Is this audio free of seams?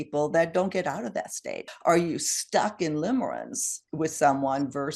no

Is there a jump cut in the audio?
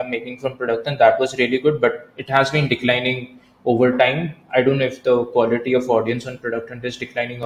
no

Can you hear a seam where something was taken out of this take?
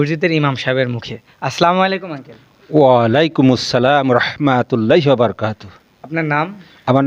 no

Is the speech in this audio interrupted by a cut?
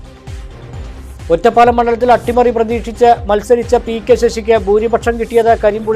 yes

